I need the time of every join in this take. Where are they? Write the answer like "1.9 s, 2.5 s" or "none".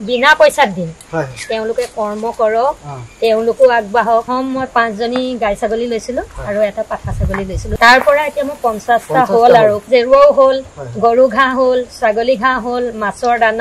4.3 s, 7.6 s, 9.8 s